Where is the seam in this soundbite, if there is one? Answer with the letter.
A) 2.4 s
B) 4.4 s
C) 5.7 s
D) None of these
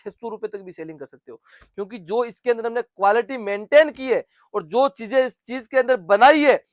D